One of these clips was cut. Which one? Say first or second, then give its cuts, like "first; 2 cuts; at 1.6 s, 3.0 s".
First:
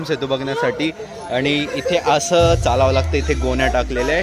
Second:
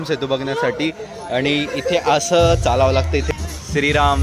second; 1 cut; at 3.3 s